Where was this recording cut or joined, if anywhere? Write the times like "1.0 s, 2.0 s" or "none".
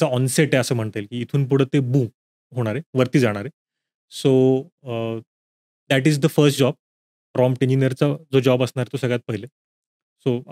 none